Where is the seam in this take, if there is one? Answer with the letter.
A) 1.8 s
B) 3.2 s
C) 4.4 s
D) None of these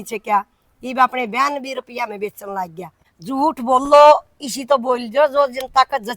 B